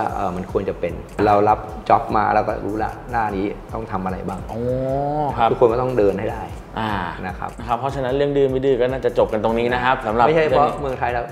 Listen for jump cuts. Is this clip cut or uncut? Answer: uncut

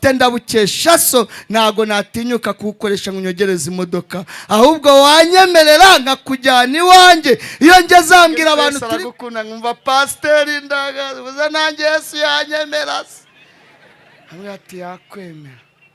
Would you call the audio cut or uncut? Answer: cut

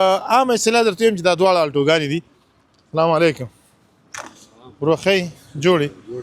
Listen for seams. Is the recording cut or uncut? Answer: uncut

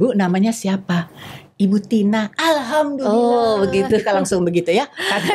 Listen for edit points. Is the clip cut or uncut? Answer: uncut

